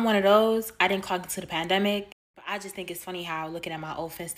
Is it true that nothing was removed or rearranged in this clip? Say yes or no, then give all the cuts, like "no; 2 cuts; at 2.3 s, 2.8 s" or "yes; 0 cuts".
yes; 0 cuts